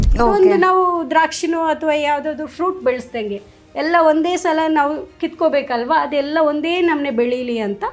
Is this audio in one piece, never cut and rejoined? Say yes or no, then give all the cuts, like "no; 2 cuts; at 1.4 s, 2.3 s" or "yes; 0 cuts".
yes; 0 cuts